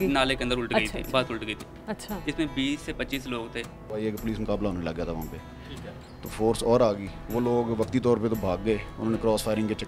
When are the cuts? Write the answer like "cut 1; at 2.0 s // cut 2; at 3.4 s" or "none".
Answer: cut 1; at 4.0 s